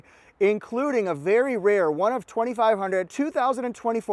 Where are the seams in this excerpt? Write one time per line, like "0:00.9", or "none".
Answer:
0:03.1